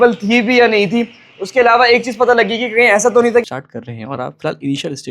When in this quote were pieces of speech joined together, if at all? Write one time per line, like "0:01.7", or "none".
0:03.4